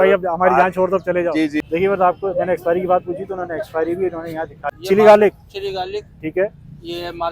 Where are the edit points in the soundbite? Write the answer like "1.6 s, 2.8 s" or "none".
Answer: 1.6 s, 4.8 s